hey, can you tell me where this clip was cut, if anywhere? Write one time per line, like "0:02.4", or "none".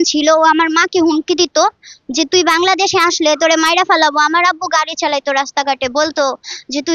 none